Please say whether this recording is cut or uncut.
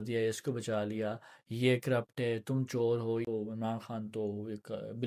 cut